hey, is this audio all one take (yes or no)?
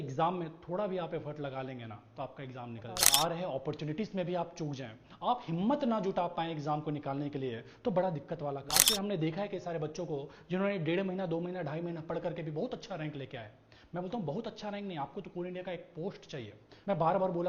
no